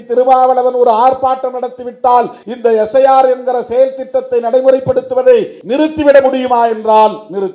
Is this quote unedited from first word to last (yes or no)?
no